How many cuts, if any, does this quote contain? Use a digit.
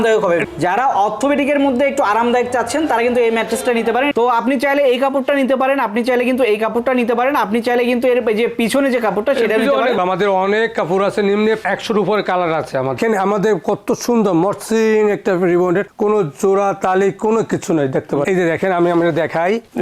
3